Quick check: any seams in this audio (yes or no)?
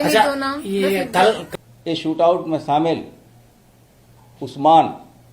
yes